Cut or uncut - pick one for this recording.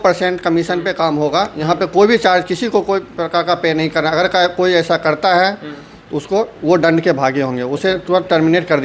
uncut